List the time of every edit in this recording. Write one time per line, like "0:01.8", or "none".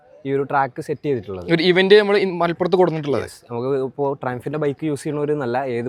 none